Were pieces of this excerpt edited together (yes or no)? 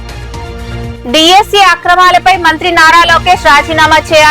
yes